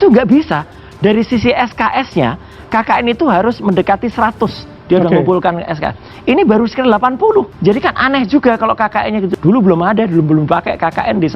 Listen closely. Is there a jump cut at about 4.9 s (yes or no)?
no